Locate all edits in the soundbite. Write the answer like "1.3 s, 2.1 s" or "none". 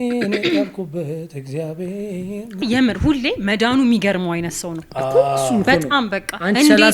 2.6 s